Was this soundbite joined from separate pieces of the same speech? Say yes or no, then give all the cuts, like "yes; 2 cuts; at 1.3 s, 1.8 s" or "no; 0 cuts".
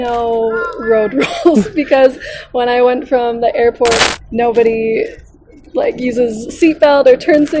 yes; 1 cut; at 4.1 s